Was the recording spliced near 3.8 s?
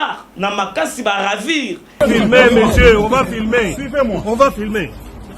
no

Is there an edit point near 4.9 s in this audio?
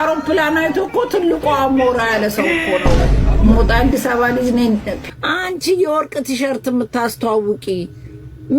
yes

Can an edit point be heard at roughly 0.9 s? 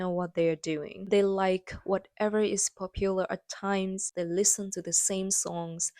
yes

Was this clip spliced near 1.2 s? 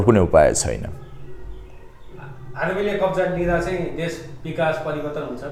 no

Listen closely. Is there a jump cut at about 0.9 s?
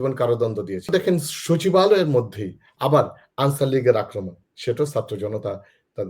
yes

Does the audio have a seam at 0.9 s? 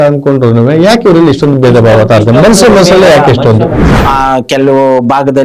no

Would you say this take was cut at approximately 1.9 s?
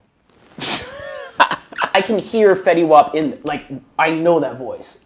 yes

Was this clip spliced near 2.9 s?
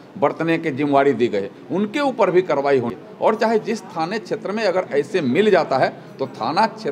yes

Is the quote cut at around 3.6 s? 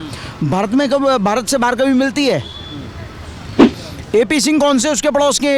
yes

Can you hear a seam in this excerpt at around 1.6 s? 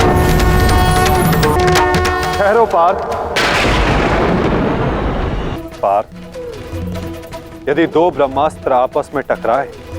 yes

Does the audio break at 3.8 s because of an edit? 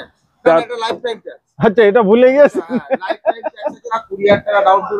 yes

